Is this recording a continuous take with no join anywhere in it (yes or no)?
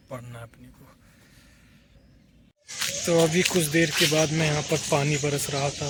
yes